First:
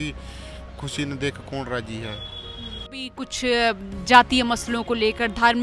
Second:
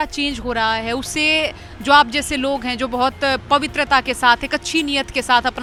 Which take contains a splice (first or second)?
first